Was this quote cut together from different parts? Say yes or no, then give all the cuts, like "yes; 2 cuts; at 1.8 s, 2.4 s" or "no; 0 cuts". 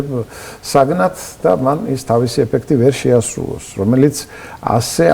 no; 0 cuts